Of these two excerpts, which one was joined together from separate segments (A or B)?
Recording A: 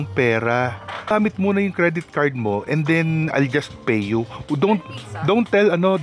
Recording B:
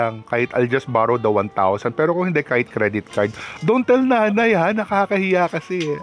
A